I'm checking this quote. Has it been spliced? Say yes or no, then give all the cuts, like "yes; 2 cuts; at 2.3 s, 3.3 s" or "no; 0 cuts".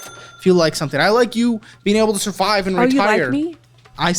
no; 0 cuts